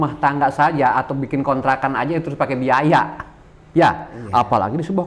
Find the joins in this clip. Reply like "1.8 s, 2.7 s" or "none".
none